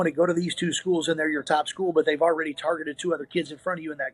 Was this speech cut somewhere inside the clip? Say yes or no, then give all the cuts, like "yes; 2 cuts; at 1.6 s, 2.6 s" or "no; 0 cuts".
no; 0 cuts